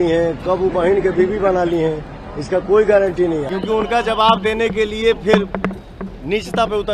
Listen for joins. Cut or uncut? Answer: cut